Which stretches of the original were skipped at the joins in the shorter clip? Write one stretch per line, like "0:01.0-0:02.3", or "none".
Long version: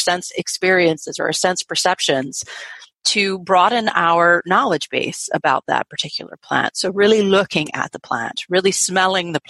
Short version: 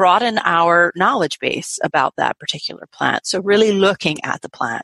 none